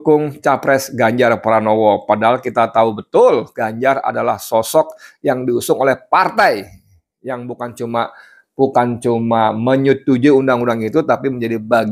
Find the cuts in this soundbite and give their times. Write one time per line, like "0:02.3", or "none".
none